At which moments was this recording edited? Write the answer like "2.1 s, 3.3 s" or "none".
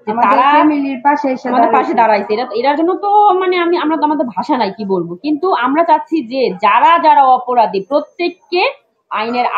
none